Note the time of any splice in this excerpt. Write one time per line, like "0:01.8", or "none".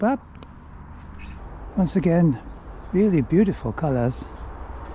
0:01.5